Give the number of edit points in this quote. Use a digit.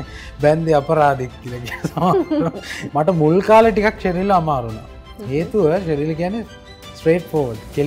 1